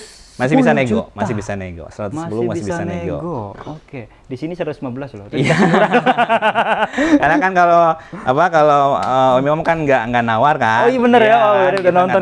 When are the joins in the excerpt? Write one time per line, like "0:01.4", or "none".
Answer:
none